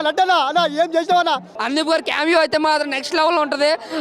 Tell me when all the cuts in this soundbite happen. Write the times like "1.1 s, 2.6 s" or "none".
1.5 s